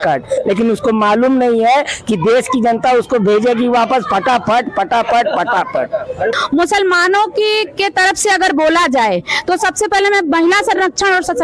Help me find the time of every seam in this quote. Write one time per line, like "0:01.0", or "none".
0:06.4